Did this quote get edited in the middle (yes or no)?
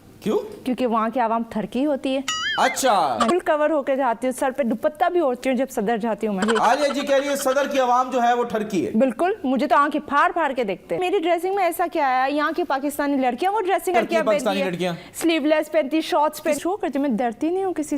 yes